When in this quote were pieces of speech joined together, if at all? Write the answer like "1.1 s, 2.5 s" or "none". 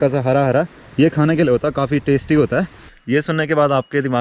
2.8 s